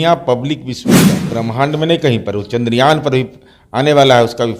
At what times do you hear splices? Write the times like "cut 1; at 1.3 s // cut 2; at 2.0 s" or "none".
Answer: cut 1; at 1.2 s

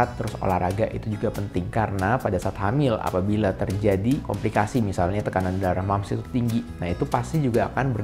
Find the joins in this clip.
none

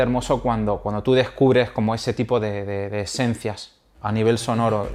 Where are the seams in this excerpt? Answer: none

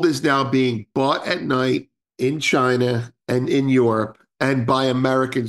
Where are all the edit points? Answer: cut 1; at 2.0 s

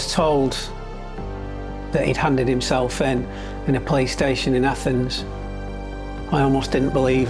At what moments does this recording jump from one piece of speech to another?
none

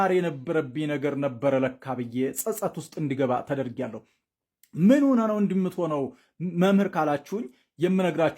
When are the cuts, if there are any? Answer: none

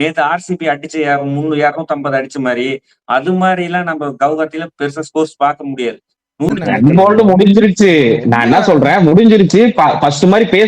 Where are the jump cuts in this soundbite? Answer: cut 1; at 6.5 s

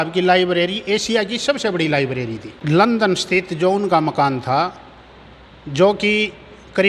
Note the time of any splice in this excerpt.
cut 1; at 2.9 s

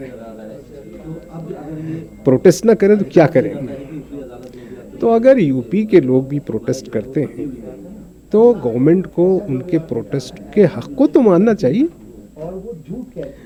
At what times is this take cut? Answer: none

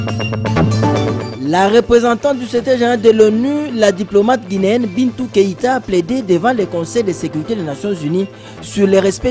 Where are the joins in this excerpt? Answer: cut 1; at 1.3 s

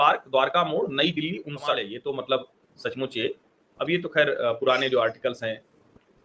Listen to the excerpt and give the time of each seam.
none

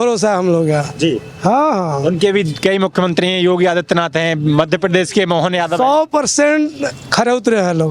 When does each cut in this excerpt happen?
none

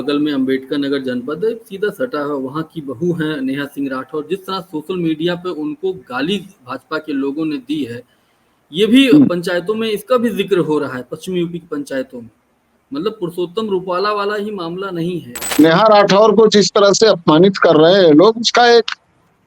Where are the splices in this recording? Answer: cut 1; at 15.4 s

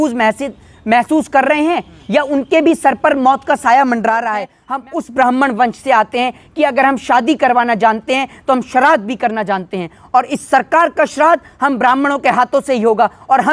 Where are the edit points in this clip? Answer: cut 1; at 4.8 s

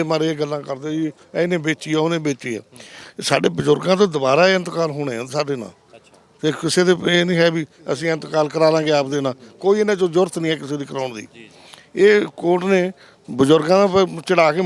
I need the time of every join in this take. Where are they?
none

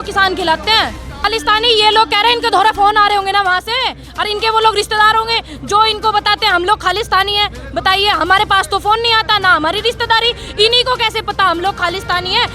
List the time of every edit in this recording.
cut 1; at 1.3 s

